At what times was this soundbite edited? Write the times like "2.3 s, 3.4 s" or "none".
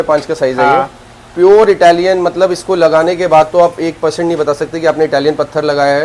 none